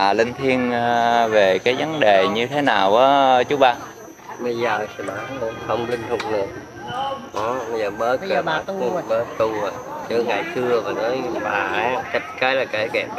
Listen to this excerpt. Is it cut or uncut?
uncut